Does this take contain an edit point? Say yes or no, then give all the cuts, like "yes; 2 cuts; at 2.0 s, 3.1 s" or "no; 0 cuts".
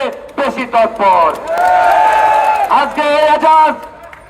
no; 0 cuts